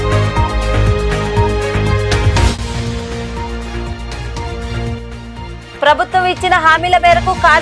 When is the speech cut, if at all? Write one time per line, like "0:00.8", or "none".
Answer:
0:02.2